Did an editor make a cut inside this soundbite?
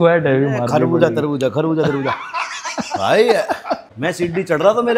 yes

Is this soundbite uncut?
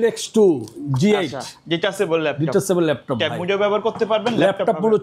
yes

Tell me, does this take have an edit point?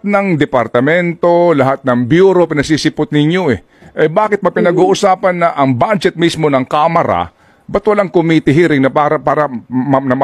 no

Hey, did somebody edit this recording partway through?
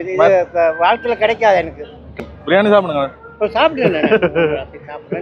yes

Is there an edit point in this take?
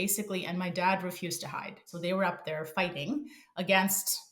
yes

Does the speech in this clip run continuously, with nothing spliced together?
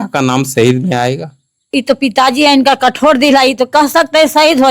no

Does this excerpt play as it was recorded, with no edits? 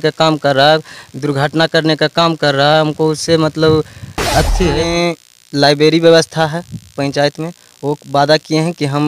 no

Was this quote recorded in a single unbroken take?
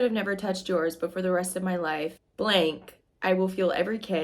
no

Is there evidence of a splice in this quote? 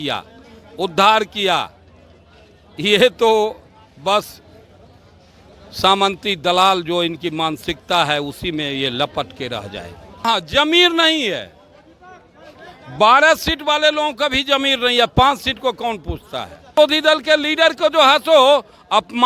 yes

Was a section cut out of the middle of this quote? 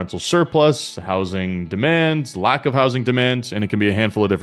no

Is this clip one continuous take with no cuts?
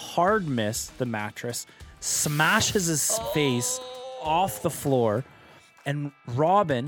yes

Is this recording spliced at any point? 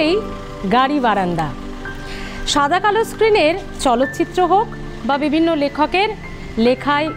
no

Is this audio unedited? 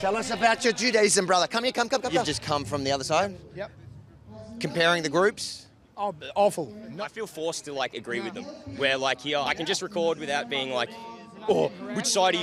no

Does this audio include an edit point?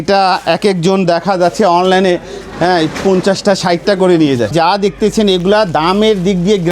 yes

